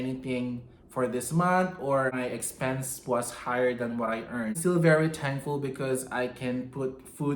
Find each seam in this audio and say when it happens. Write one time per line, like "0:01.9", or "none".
0:02.1
0:04.6